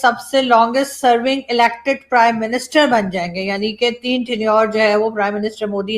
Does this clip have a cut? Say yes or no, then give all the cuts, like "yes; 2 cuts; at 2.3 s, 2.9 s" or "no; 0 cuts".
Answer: no; 0 cuts